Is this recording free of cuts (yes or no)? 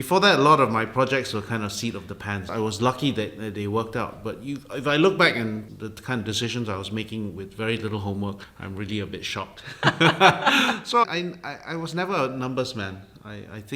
no